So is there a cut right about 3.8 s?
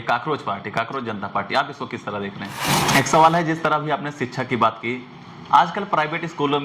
no; 1 cut; at 2.6 s

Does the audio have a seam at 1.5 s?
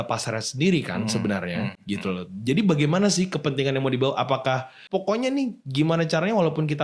no; 1 cut; at 4.7 s

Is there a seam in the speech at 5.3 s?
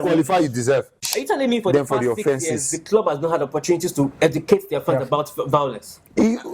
no; 1 cut; at 1.0 s

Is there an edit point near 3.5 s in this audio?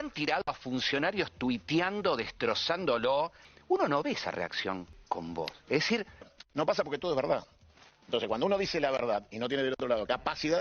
yes; 3 cuts; at 3.5 s, 4.9 s, 6.4 s

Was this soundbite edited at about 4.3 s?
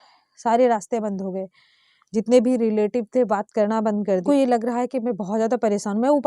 yes; 1 cut; at 4.3 s

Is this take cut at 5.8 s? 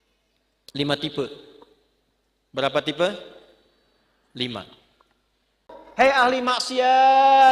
yes; 1 cut; at 5.8 s

